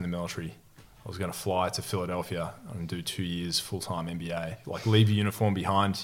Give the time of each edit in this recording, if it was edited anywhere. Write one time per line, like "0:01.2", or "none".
0:04.6